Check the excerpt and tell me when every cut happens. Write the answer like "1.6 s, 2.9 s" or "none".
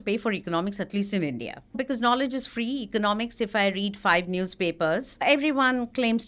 1.8 s, 5.2 s